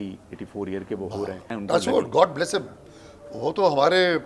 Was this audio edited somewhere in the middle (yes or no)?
yes